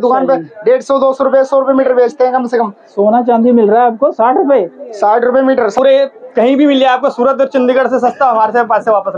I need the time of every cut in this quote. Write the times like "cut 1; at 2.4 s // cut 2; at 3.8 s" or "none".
cut 1; at 5.8 s